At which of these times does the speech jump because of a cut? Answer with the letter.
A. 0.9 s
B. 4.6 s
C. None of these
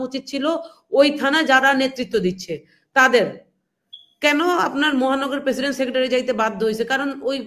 C